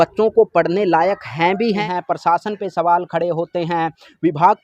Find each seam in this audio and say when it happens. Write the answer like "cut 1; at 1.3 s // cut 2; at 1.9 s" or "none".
cut 1; at 1.8 s